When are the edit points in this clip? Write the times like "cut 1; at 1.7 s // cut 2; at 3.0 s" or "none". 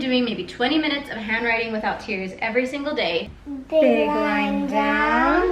cut 1; at 3.4 s